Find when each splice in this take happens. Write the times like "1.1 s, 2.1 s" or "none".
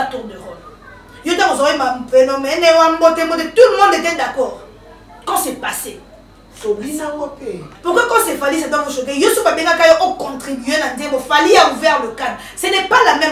7.7 s